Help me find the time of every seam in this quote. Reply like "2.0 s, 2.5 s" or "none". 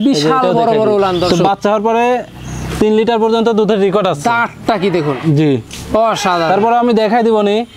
1.3 s